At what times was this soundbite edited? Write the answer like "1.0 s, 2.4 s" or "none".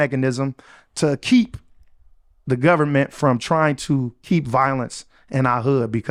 none